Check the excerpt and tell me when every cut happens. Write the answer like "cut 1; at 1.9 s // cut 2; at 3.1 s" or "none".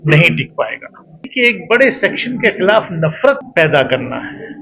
cut 1; at 1.3 s // cut 2; at 3.5 s